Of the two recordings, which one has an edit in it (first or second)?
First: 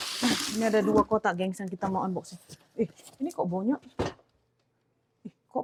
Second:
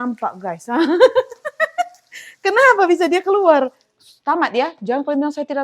second